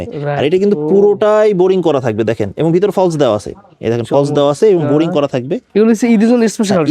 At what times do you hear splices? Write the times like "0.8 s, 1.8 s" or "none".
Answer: 5.6 s